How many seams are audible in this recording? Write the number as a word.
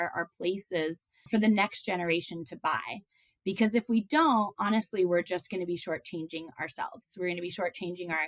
one